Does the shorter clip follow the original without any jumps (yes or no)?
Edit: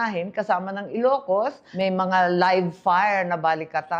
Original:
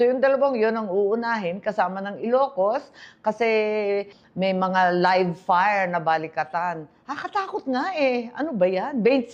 no